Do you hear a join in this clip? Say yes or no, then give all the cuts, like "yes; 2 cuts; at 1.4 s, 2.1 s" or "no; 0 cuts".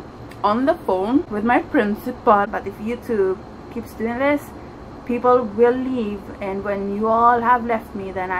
yes; 2 cuts; at 1.3 s, 2.5 s